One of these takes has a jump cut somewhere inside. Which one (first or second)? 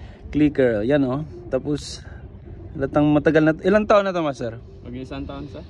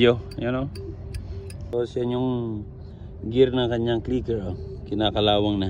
second